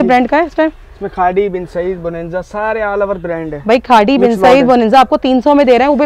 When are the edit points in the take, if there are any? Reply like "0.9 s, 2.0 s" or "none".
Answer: none